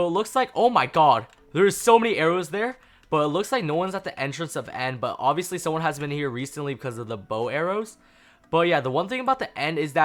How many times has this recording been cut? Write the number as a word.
zero